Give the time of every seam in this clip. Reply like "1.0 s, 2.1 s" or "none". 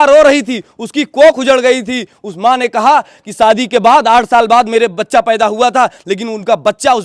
none